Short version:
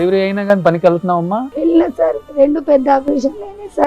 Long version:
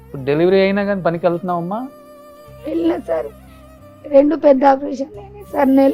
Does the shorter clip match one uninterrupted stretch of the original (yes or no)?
no